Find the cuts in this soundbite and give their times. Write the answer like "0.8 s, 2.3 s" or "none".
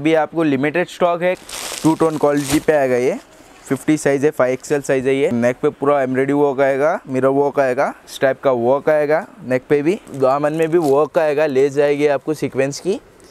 1.4 s, 5.3 s, 8.0 s, 10.1 s